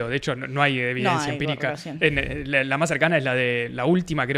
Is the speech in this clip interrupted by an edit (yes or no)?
no